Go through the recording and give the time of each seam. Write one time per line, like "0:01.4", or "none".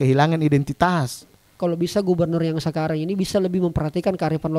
0:01.5

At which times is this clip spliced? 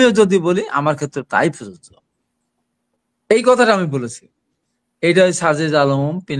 none

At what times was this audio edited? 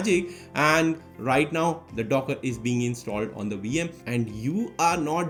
none

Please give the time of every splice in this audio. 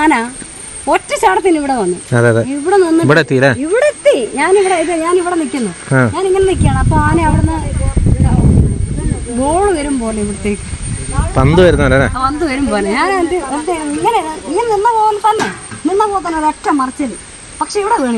none

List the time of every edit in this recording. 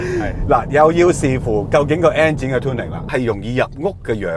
0:02.9

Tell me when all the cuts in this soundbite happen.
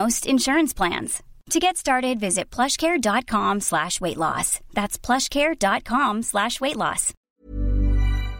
0:07.1

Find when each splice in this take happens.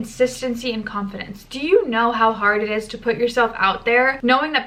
none

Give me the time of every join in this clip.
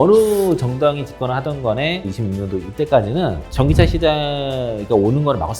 0:02.2

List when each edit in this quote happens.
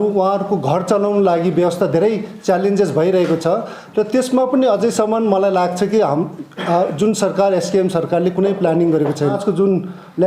0:09.4

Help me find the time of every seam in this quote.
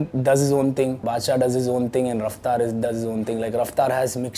0:01.0

